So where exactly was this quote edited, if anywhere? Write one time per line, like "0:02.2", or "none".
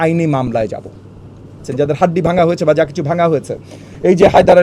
0:01.7